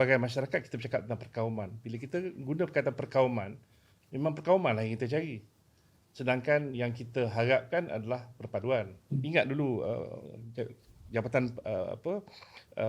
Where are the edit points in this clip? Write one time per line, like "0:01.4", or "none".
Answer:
0:09.2